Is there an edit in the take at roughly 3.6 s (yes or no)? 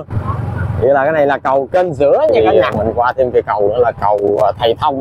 no